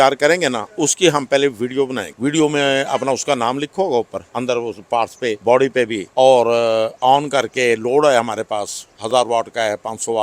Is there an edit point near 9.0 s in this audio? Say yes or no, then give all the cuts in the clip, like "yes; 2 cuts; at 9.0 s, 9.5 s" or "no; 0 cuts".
no; 4 cuts; at 2.1 s, 4.2 s, 5.4 s, 6.0 s